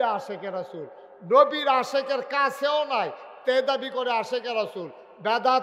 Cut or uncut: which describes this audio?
uncut